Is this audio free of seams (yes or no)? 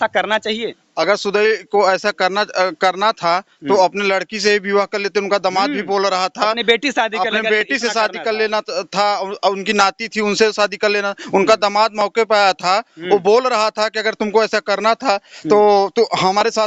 yes